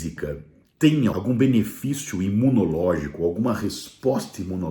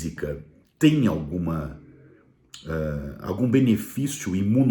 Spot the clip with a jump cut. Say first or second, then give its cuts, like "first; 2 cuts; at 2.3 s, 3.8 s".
first; 1 cut; at 1.1 s